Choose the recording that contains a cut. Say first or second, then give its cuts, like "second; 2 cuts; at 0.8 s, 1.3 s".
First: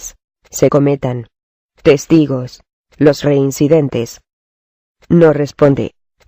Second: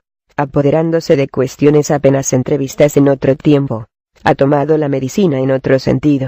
first; 1 cut; at 3.2 s